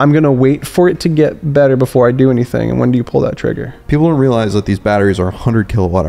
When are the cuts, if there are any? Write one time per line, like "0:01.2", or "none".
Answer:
0:03.7